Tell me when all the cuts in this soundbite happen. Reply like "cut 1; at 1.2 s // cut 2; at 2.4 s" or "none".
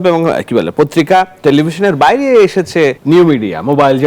cut 1; at 3.0 s